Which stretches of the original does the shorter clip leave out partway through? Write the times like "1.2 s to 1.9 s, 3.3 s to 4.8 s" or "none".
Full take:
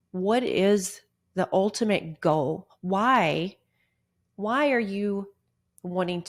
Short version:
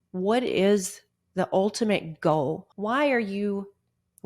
2.7 s to 4.3 s